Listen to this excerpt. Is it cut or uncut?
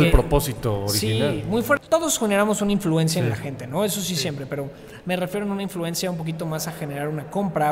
cut